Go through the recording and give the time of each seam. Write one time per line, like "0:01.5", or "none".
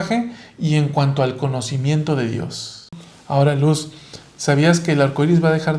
0:03.1